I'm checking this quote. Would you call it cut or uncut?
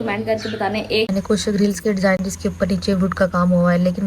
cut